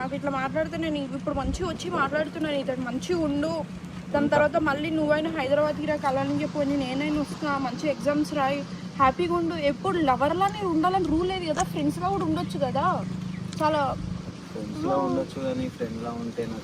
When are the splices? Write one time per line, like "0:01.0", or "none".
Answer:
0:13.8